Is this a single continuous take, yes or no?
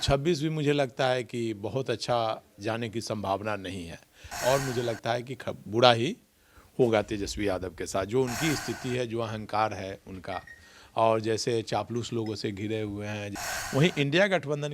no